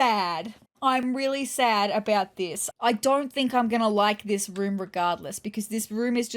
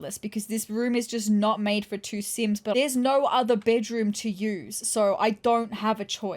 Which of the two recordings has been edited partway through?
second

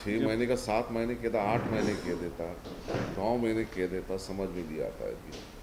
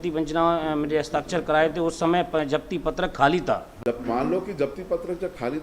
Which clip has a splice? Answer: second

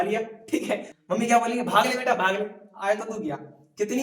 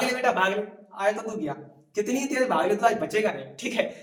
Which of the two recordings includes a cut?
first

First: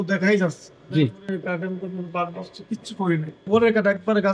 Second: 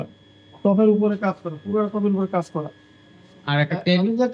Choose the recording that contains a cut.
first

